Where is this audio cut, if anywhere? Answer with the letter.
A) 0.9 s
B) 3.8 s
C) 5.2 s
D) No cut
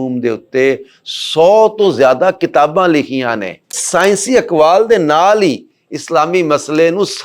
B